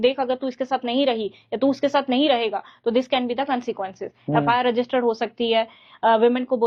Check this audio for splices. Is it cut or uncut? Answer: uncut